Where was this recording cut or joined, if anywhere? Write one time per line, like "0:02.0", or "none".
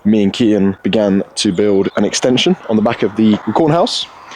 0:00.8
0:01.9
0:03.4